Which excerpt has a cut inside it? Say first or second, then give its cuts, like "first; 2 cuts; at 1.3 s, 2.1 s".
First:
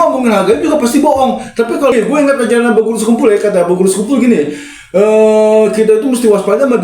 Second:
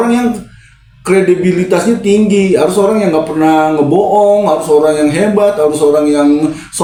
first; 1 cut; at 1.9 s